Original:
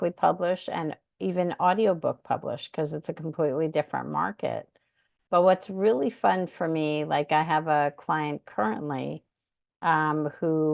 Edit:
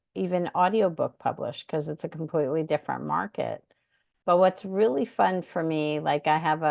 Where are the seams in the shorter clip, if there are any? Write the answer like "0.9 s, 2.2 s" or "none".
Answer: none